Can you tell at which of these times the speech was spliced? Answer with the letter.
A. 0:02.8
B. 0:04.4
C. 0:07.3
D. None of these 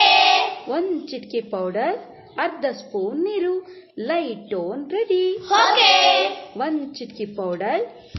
C